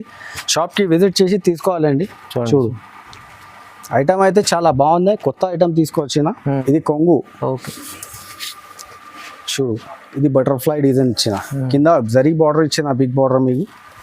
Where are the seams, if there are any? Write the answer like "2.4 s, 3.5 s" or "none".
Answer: 6.6 s

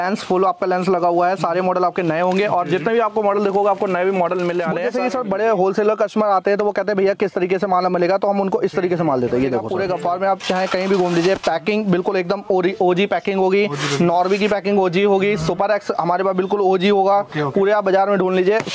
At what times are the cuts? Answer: 4.8 s, 9.7 s

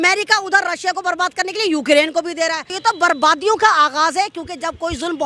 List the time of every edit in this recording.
2.7 s

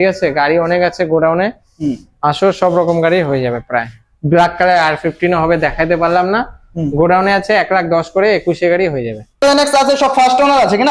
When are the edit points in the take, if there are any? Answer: 9.4 s

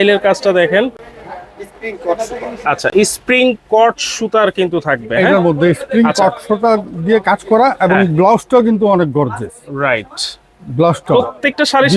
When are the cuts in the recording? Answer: none

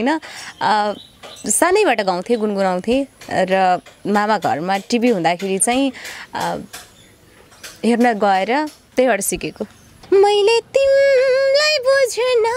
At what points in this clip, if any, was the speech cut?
10.1 s

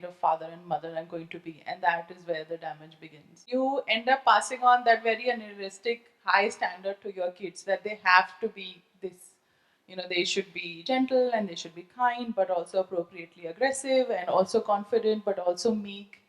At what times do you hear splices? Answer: 3.5 s

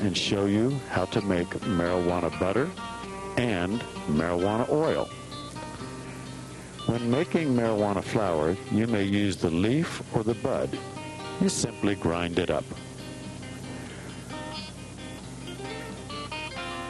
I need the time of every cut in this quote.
11.0 s

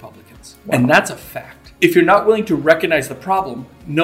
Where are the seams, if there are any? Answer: 1.6 s

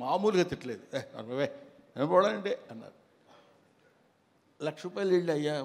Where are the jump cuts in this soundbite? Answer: none

